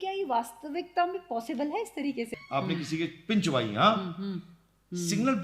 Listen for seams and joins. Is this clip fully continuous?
no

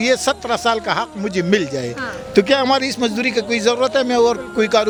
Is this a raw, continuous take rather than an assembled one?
yes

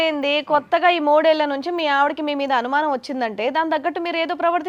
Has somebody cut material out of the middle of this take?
no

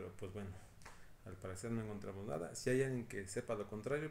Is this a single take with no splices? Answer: yes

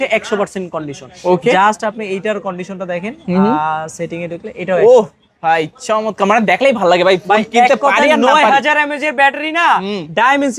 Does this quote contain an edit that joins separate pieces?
no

